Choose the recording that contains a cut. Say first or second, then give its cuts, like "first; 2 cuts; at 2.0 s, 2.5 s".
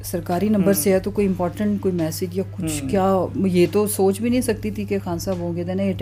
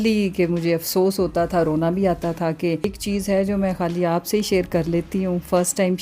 second; 1 cut; at 3.0 s